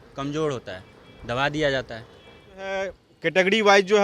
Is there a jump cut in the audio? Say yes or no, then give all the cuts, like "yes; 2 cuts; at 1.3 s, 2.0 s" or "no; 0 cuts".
yes; 1 cut; at 2.7 s